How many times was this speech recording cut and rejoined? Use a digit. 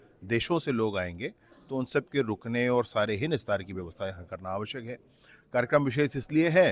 0